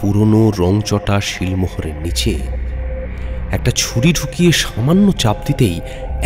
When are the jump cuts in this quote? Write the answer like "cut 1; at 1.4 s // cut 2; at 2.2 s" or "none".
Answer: none